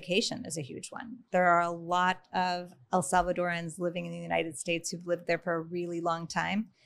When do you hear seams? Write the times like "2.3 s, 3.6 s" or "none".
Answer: none